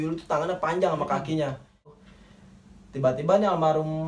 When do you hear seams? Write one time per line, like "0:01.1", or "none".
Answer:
0:02.0